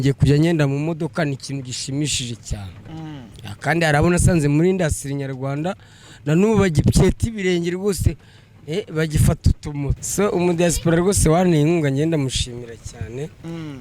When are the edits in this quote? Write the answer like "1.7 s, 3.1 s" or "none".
10.0 s